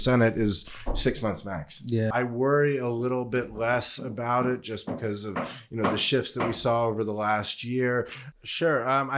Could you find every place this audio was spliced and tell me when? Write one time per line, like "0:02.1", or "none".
0:02.1
0:08.2